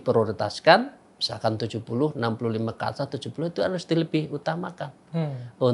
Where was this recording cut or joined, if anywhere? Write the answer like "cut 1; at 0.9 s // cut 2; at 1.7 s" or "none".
none